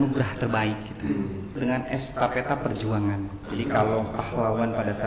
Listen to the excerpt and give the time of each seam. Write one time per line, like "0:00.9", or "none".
0:01.6